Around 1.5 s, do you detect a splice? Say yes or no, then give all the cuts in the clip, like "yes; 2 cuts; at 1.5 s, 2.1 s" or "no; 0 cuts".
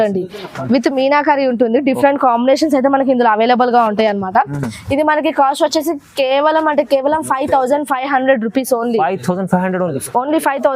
no; 0 cuts